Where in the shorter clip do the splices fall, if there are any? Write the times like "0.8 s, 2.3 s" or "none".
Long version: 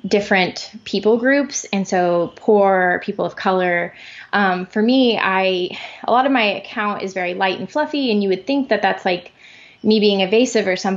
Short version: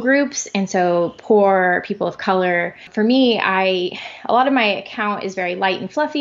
2.9 s